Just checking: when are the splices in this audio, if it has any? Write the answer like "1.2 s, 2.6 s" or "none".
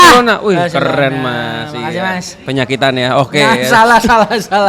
none